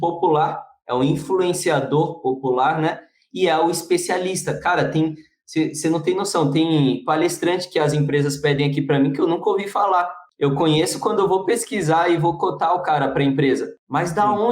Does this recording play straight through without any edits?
yes; 0 cuts

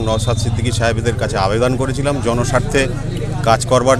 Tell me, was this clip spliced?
no; 0 cuts

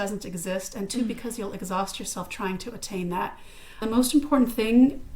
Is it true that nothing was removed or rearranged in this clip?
no; 1 cut; at 3.8 s

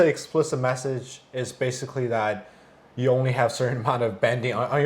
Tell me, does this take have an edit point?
no; 0 cuts

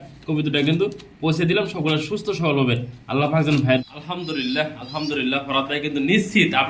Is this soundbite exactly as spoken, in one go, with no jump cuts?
no; 1 cut; at 3.8 s

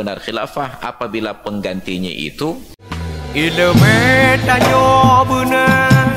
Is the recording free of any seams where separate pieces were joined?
no; 1 cut; at 3.0 s

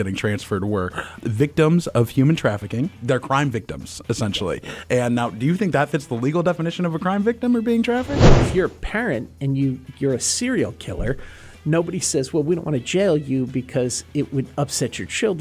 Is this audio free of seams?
no; 3 cuts; at 1.2 s, 3.0 s, 8.1 s

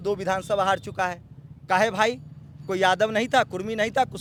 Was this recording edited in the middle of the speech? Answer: no; 0 cuts

